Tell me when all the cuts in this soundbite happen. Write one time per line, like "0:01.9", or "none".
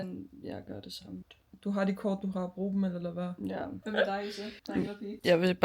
0:01.2
0:03.8